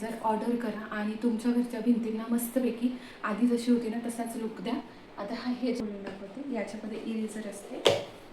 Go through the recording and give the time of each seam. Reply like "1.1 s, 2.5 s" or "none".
5.8 s